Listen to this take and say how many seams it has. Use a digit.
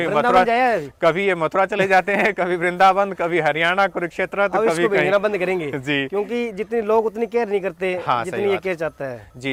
0